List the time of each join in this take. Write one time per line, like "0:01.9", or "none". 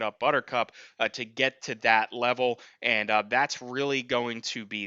none